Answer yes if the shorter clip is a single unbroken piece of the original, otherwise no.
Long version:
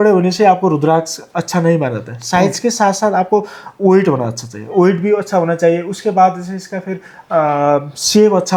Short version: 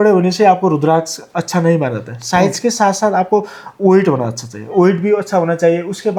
yes